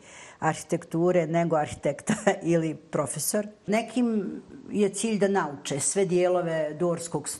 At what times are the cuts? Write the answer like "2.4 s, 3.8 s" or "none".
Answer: 3.7 s